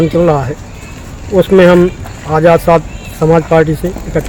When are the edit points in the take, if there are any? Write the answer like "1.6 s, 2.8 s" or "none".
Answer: none